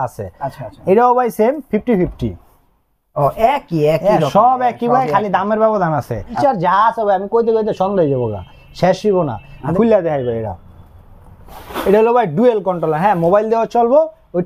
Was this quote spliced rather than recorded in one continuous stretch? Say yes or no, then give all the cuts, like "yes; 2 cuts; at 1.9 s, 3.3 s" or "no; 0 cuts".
yes; 2 cuts; at 6.4 s, 9.6 s